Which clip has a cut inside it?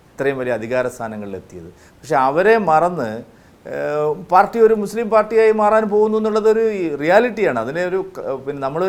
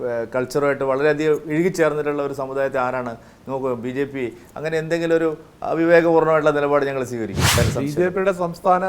second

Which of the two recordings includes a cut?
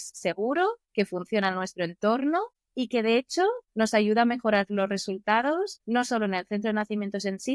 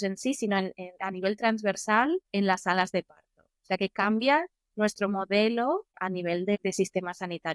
first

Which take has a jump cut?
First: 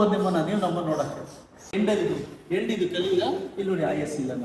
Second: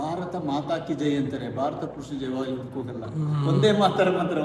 first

